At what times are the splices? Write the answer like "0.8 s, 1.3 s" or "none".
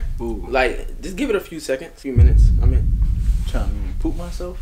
none